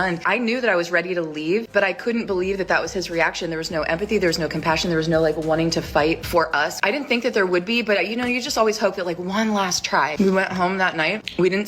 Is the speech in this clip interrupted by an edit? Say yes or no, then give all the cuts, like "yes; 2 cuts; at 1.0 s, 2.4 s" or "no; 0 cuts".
yes; 2 cuts; at 4.5 s, 10.3 s